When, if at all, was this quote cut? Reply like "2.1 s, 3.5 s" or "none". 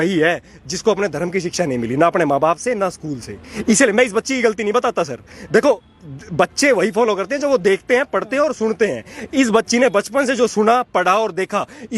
none